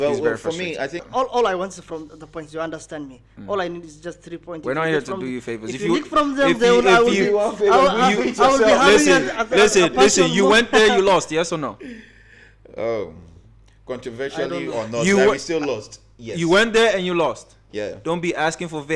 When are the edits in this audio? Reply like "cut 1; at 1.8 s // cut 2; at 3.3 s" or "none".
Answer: cut 1; at 1.0 s